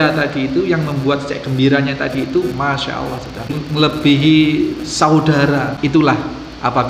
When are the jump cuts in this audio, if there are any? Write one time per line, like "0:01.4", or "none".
0:03.5
0:05.7